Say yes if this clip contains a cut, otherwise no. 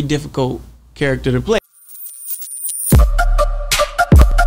yes